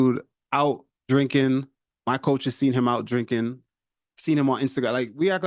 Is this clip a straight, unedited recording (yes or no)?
no